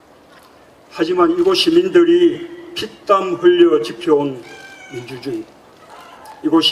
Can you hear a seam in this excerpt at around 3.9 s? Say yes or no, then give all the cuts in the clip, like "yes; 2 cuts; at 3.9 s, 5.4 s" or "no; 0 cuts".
yes; 1 cut; at 3.9 s